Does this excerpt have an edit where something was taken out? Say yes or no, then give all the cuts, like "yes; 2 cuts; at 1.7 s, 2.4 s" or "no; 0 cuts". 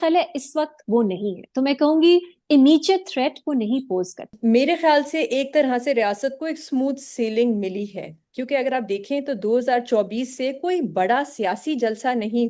yes; 1 cut; at 4.3 s